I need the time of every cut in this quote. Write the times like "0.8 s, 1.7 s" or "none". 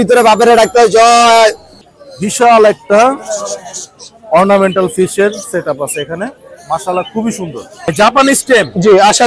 1.7 s, 7.8 s